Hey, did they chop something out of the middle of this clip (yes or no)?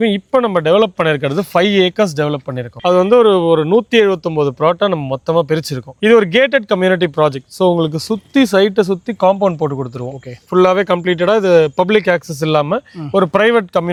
no